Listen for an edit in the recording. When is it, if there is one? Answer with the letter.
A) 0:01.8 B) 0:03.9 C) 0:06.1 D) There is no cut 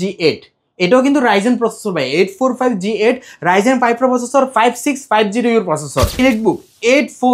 C